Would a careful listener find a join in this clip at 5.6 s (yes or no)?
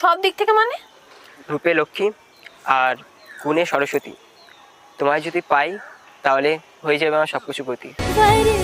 no